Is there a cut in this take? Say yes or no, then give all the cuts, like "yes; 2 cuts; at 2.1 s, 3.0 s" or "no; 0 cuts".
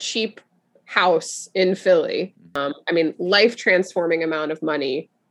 yes; 1 cut; at 2.6 s